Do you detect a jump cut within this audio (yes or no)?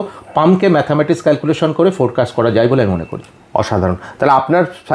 no